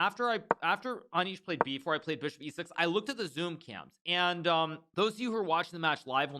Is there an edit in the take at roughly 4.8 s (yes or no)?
yes